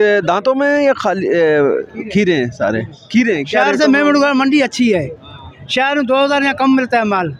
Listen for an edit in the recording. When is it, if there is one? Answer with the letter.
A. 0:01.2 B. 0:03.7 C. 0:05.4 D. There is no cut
B